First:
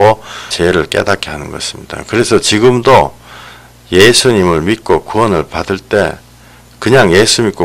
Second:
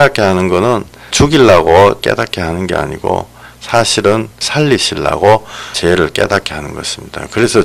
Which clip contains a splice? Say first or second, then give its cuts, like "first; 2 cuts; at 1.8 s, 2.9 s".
second; 1 cut; at 2.0 s